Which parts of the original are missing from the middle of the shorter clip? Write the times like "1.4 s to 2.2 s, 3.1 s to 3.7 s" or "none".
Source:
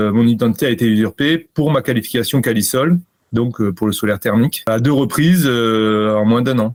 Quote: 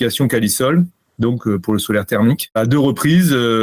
none